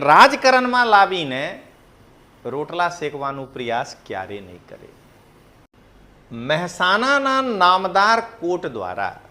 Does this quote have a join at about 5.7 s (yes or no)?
yes